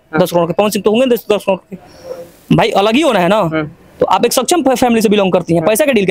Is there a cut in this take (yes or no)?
no